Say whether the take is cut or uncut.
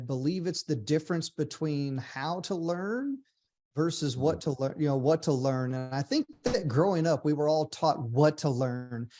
uncut